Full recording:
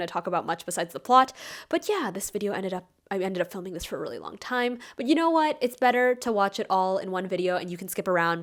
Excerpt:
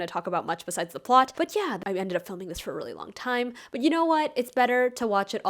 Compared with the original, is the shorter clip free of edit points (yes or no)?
no